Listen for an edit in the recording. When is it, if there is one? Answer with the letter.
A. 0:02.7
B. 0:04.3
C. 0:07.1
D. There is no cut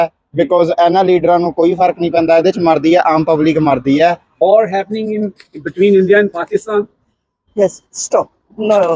B